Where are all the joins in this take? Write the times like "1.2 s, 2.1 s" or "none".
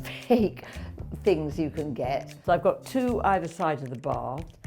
2.3 s